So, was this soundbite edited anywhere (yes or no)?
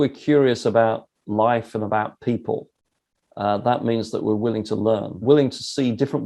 yes